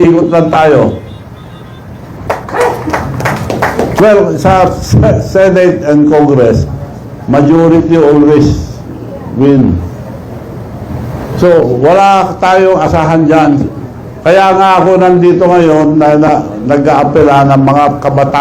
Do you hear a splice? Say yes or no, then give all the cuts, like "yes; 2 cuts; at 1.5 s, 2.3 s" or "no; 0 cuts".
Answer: yes; 1 cut; at 2.2 s